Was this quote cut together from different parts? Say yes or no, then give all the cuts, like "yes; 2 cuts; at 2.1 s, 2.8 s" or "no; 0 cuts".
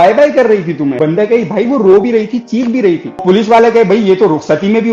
yes; 2 cuts; at 0.9 s, 3.2 s